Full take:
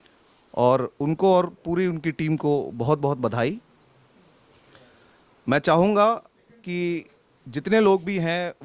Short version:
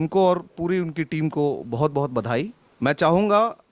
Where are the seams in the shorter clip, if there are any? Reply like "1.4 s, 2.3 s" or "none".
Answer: 2.6 s

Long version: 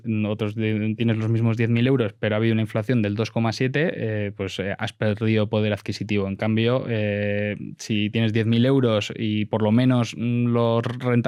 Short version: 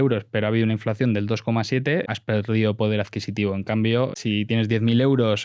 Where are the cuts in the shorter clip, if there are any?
2.1 s, 4.1 s

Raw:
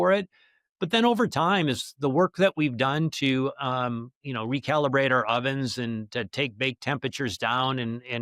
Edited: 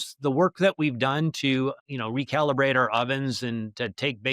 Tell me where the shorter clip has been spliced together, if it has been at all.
1.8 s

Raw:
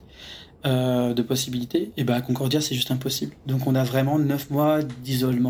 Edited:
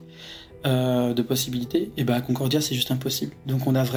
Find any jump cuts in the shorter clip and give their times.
none

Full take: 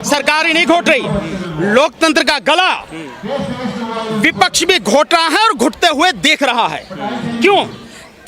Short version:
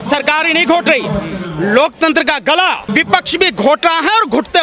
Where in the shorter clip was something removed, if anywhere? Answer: 2.8 s

